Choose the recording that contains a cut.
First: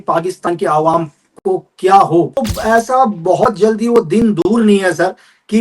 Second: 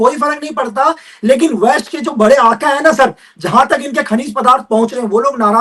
first; 1 cut; at 2.4 s

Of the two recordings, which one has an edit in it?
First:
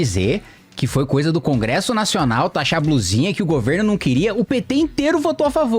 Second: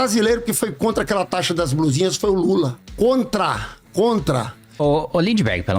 second; 2 cuts; at 2.8 s, 4.7 s

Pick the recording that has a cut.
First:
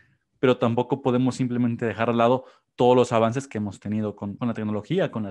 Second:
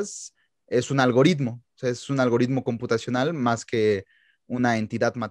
first; 1 cut; at 4.3 s

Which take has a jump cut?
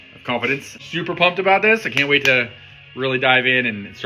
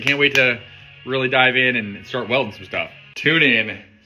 second; 1 cut; at 3.1 s

